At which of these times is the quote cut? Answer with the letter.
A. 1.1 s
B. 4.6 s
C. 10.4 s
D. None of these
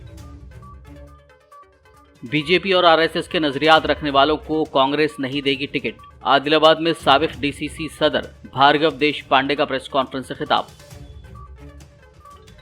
A